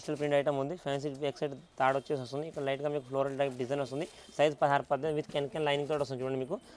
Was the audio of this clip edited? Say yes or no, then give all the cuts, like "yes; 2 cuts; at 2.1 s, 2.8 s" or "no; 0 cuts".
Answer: no; 0 cuts